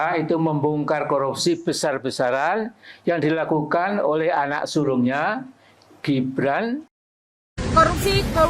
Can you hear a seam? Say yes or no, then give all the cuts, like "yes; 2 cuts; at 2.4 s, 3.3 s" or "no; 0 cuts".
yes; 1 cut; at 7.1 s